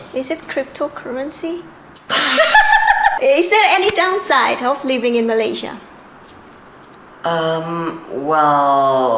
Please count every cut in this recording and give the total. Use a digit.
1